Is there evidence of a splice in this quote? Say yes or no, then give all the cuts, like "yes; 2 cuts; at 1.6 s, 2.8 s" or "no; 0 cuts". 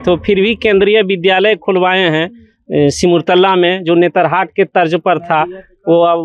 no; 0 cuts